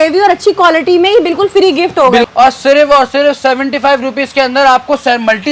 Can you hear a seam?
yes; 1 cut; at 2.2 s

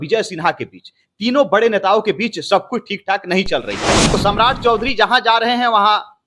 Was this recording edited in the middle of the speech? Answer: yes; 1 cut; at 4.1 s

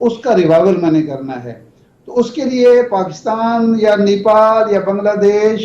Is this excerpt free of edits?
yes; 0 cuts

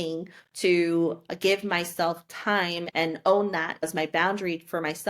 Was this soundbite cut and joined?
yes; 1 cut; at 3.8 s

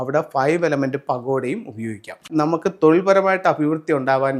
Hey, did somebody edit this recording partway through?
yes; 1 cut; at 2.2 s

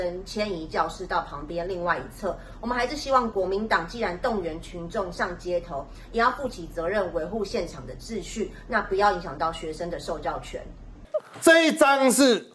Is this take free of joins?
yes; 0 cuts

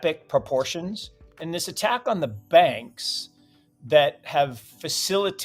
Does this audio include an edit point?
yes; 1 cut; at 1.4 s

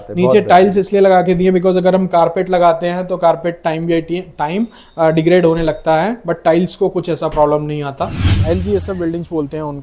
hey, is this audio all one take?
no; 1 cut; at 8.4 s

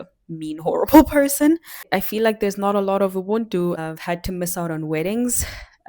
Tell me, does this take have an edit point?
yes; 2 cuts; at 1.8 s, 3.8 s

